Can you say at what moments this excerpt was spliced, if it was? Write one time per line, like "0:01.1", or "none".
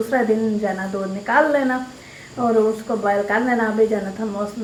none